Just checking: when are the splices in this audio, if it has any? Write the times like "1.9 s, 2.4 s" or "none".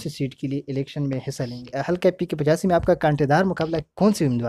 1.8 s